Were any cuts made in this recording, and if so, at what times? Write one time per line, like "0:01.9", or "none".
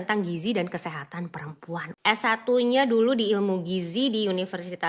0:01.9